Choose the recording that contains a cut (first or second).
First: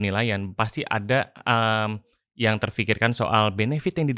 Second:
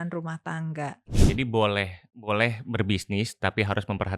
second